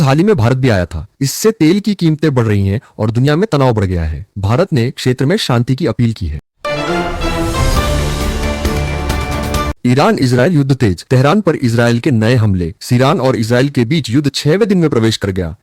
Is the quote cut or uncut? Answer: cut